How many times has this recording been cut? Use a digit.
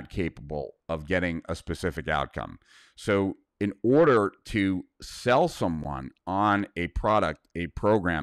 0